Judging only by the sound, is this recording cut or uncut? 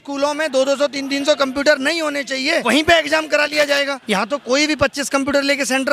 cut